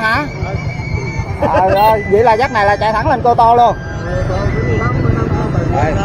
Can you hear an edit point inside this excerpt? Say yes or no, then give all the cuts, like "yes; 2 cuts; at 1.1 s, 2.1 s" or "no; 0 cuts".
no; 0 cuts